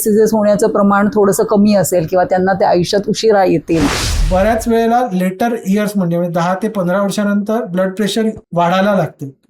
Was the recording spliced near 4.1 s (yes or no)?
yes